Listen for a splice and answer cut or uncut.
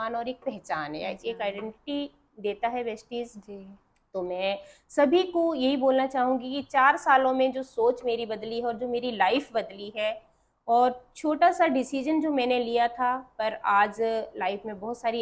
uncut